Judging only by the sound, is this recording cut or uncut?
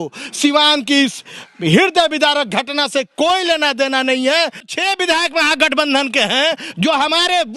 cut